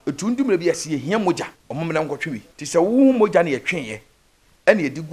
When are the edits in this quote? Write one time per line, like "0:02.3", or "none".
0:01.6
0:02.5